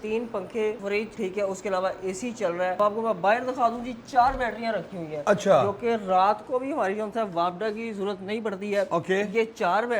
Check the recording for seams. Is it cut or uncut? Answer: cut